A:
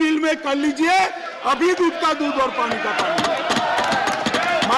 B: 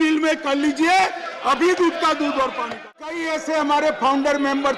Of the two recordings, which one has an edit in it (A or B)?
B